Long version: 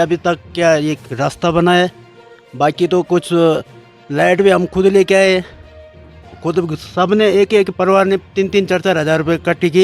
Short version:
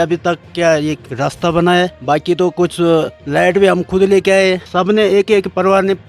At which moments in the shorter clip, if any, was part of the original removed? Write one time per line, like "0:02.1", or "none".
0:02.0
0:03.2
0:04.7